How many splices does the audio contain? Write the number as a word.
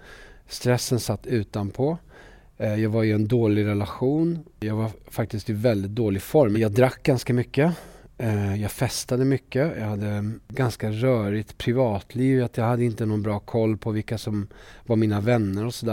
three